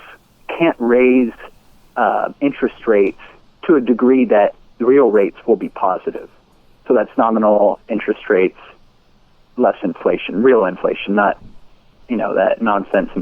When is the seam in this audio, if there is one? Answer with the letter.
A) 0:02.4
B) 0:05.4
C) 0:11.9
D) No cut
D